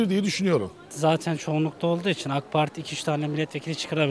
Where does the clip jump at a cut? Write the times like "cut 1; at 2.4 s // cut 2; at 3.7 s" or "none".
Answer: cut 1; at 0.9 s